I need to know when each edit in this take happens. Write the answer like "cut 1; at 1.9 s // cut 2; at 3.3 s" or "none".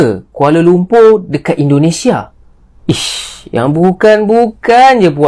none